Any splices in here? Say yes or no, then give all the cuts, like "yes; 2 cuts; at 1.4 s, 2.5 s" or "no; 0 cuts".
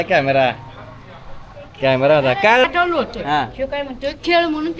yes; 1 cut; at 2.6 s